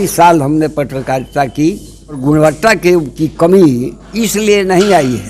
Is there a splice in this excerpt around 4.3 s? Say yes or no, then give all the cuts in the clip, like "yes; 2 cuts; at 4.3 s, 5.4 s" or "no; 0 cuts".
no; 1 cut; at 2.2 s